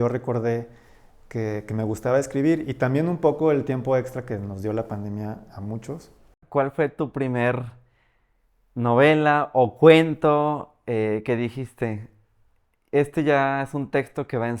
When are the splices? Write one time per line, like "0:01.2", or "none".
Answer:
0:06.4